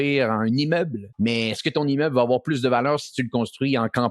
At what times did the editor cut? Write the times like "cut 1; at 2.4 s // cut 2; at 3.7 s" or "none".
cut 1; at 1.0 s